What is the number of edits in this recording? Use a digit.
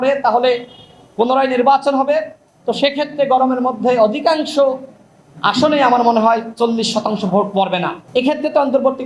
1